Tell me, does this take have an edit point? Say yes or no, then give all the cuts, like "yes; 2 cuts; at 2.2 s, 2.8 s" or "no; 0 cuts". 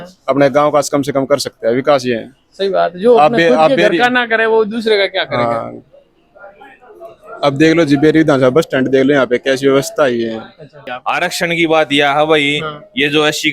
yes; 1 cut; at 10.9 s